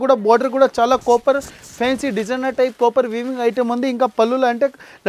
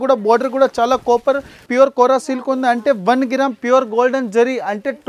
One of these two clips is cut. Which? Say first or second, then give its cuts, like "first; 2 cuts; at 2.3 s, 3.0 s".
second; 1 cut; at 1.7 s